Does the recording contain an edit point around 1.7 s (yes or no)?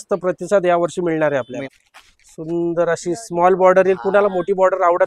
yes